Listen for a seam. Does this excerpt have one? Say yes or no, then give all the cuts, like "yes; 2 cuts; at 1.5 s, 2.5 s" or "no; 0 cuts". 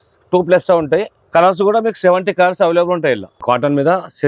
yes; 2 cuts; at 1.2 s, 3.4 s